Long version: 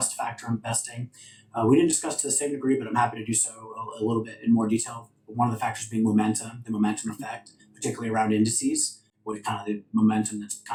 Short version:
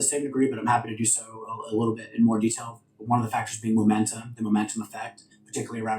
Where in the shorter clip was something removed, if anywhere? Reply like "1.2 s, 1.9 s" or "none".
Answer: none